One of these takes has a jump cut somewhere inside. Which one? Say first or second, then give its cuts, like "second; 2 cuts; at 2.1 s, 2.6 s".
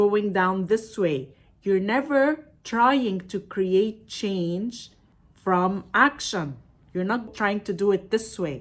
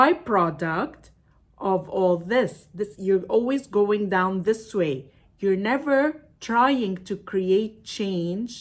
first; 1 cut; at 7.3 s